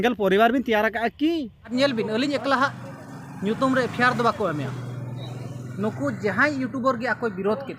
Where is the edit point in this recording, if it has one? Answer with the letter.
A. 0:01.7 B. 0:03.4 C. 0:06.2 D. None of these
A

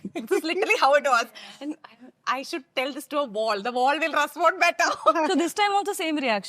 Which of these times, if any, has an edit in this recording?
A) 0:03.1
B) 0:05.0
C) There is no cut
C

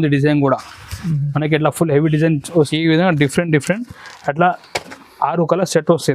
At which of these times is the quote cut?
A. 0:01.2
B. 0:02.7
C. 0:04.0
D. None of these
B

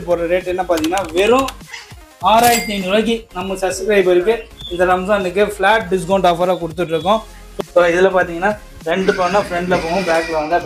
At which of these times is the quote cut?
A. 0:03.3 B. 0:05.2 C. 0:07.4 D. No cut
C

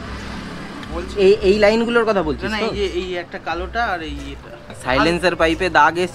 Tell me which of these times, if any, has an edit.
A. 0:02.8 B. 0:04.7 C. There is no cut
B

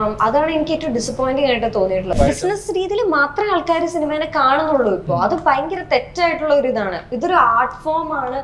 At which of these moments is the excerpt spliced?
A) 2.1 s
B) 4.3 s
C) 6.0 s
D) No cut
A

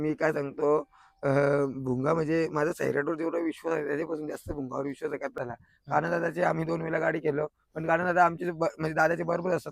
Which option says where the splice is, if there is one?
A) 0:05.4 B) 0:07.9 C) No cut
A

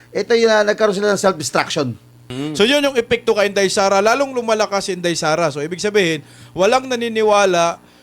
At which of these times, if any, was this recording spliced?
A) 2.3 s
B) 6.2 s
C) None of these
A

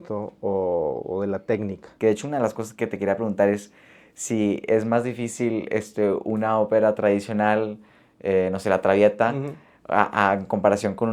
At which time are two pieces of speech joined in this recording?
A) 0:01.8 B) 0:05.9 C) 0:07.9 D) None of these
A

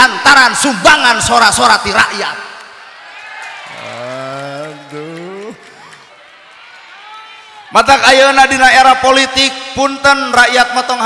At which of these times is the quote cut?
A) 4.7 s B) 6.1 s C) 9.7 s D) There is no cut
B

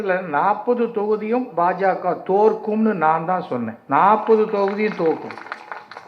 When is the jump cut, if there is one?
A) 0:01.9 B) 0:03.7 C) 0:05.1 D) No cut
B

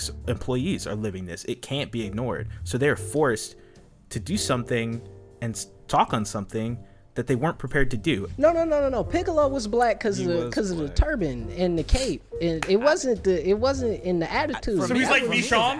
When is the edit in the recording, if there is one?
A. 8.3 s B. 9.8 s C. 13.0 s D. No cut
A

